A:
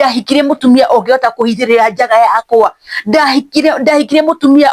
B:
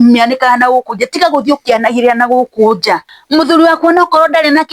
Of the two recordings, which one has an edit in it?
B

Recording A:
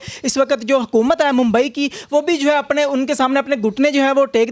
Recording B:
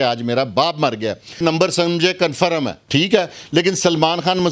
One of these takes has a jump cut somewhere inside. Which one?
B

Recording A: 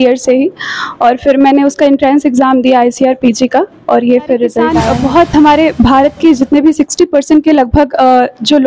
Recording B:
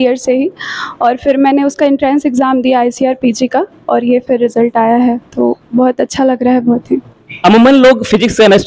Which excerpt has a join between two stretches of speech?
A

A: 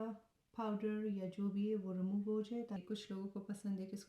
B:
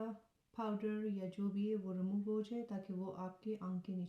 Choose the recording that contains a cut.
A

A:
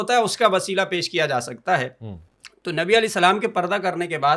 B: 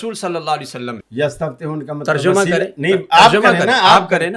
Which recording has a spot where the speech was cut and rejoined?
B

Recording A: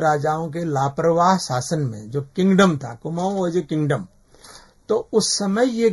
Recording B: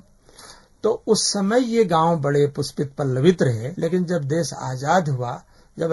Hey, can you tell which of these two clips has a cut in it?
B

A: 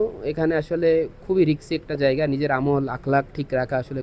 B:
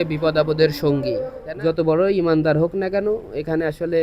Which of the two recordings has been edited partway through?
B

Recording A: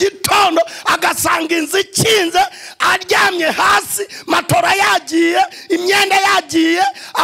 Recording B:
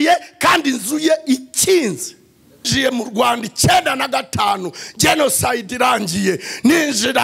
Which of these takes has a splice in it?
B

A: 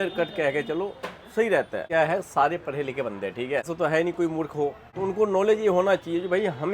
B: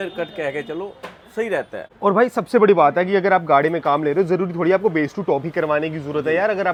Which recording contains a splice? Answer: A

